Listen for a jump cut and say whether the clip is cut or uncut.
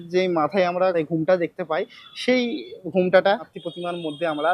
cut